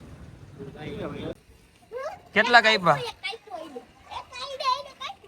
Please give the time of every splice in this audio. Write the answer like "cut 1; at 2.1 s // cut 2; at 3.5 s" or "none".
cut 1; at 1.3 s